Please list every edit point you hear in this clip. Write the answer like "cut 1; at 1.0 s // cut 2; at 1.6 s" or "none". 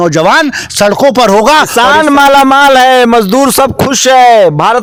none